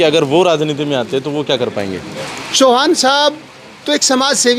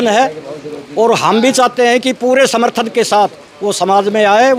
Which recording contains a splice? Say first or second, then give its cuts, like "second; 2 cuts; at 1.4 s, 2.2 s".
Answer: first; 1 cut; at 2.1 s